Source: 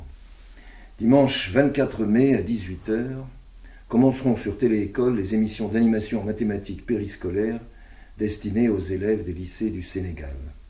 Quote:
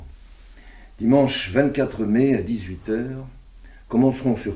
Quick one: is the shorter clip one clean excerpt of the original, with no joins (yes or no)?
yes